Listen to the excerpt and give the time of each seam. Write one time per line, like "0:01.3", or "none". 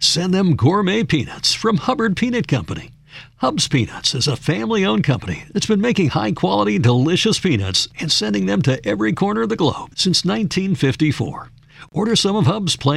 none